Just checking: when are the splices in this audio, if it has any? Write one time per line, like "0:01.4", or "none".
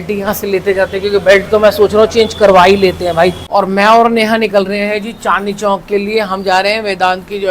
0:03.4

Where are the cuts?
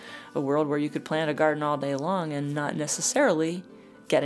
none

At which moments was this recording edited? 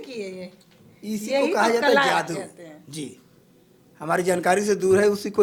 none

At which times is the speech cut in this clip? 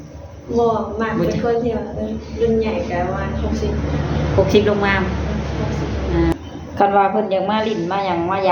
0:06.3

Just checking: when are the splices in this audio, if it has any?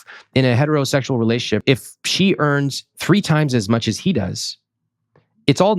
0:01.6

